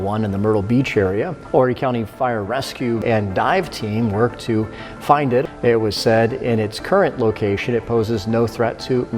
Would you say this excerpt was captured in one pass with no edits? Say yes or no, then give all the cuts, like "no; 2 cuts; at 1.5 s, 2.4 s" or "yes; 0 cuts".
no; 3 cuts; at 1.4 s, 3.0 s, 5.4 s